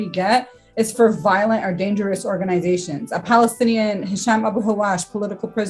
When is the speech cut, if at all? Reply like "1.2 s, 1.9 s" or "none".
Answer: none